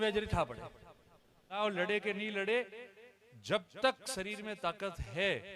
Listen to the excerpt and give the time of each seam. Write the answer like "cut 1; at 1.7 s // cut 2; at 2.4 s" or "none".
cut 1; at 1.6 s